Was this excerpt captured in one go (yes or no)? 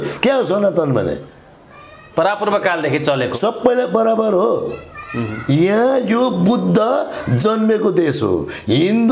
yes